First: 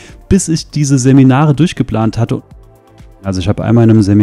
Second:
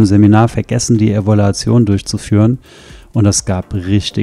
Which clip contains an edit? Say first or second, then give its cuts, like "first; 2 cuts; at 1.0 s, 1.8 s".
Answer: first; 1 cut; at 3.0 s